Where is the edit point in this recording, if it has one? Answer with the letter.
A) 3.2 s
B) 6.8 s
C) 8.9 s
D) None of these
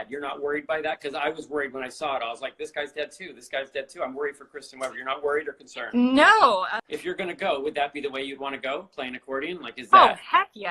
B